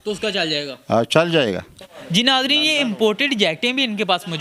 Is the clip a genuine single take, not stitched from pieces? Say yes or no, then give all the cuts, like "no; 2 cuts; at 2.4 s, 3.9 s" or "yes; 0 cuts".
no; 1 cut; at 1.9 s